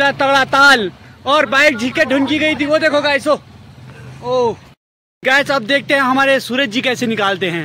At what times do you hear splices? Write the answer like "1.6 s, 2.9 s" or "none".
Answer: none